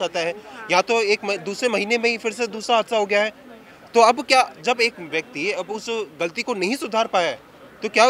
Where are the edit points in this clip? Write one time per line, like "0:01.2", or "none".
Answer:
none